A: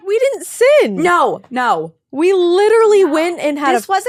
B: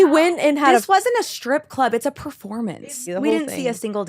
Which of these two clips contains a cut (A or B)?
B